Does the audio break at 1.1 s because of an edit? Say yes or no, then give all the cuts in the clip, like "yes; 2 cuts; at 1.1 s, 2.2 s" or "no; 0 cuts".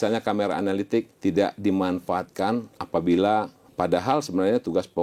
yes; 2 cuts; at 1.1 s, 3.6 s